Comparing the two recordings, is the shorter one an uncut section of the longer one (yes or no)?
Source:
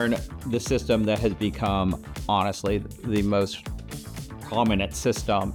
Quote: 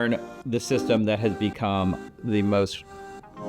no